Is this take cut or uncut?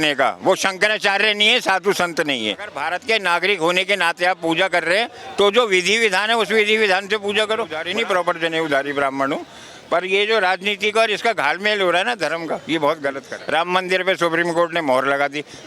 cut